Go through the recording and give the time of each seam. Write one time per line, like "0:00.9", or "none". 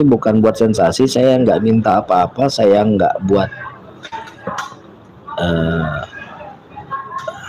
none